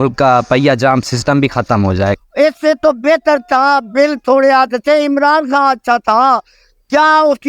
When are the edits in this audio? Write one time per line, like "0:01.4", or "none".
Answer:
0:02.2